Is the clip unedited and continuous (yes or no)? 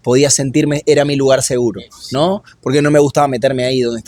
yes